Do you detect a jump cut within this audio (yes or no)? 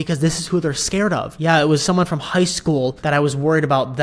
yes